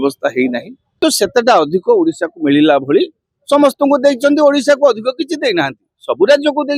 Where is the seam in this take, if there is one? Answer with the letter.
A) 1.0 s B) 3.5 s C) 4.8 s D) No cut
A